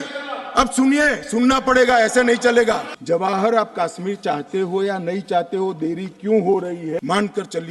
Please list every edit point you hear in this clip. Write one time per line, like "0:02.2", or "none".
0:02.9
0:07.0